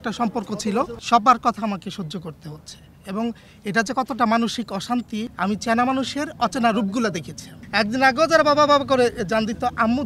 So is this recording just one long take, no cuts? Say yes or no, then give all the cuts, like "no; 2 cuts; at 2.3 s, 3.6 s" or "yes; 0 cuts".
no; 3 cuts; at 1.0 s, 5.3 s, 7.6 s